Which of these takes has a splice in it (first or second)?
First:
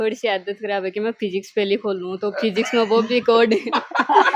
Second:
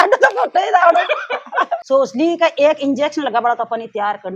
second